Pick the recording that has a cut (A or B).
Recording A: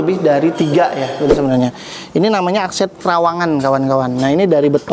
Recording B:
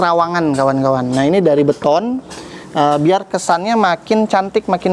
A